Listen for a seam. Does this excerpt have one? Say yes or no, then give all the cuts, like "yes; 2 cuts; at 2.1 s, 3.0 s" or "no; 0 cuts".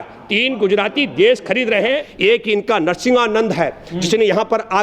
yes; 1 cut; at 2.1 s